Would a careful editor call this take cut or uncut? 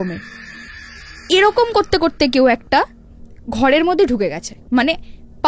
uncut